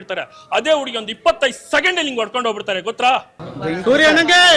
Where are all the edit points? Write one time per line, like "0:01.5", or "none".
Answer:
none